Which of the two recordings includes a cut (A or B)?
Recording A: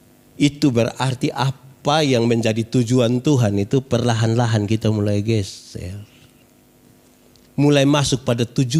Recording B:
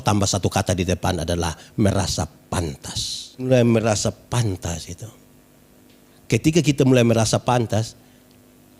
B